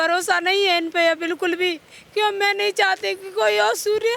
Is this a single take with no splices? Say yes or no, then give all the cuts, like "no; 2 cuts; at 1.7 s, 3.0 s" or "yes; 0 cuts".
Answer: yes; 0 cuts